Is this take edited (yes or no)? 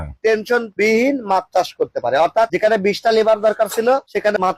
no